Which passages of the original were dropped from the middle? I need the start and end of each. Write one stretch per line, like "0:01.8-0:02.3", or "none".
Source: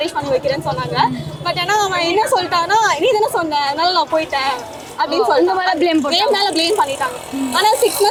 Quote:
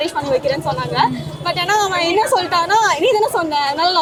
none